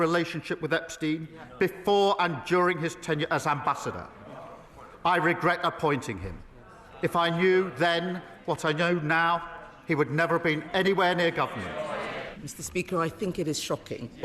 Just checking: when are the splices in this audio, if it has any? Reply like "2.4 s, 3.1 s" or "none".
12.2 s